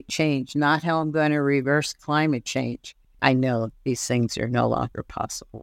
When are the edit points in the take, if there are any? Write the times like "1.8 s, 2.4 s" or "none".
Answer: 3.2 s